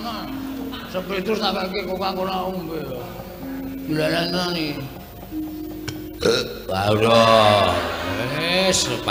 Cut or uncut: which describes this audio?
uncut